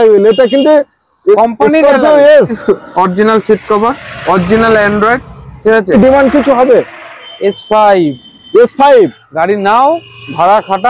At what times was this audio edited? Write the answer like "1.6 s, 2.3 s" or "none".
2.6 s, 5.9 s